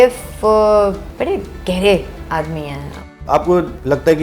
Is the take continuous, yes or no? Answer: no